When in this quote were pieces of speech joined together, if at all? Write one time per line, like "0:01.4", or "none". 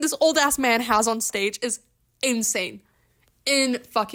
none